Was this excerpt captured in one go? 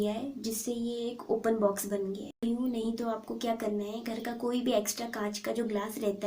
no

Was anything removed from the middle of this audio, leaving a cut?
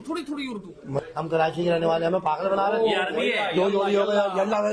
yes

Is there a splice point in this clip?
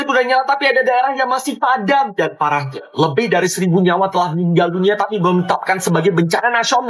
no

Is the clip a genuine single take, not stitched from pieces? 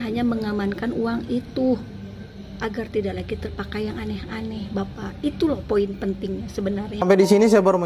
yes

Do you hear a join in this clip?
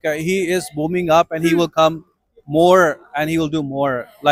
no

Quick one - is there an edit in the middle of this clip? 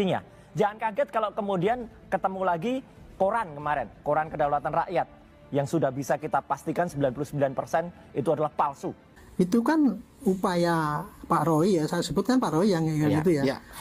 yes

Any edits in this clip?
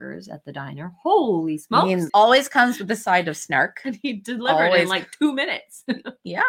yes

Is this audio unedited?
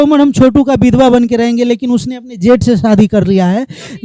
yes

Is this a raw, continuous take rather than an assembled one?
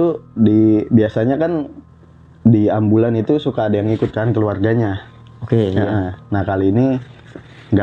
yes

